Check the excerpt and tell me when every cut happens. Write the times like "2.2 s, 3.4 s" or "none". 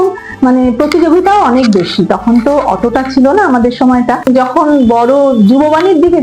4.3 s